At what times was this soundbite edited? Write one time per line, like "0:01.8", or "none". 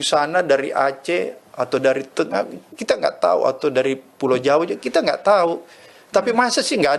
none